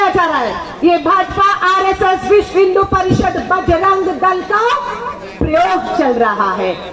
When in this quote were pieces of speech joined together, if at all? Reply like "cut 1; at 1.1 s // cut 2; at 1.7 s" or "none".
none